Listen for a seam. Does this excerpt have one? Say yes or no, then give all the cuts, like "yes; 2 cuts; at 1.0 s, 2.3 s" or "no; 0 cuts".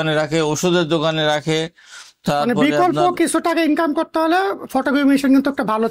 no; 0 cuts